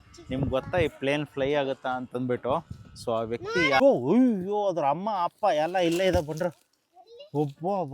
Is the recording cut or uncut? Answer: cut